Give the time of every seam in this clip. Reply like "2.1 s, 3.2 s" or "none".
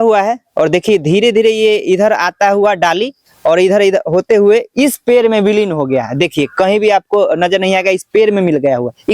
none